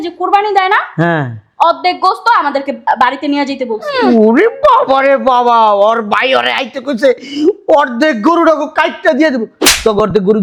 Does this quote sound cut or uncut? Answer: uncut